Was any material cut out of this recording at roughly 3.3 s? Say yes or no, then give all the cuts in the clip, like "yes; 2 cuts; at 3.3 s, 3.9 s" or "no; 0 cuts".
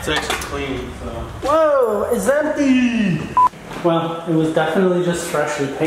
yes; 1 cut; at 3.3 s